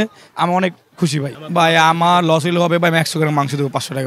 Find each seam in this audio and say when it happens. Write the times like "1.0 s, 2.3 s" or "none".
1.3 s